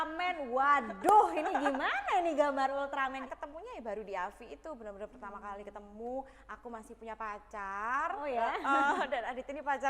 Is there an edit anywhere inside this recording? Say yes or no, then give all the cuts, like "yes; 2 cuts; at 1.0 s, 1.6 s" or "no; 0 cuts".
yes; 1 cut; at 3.2 s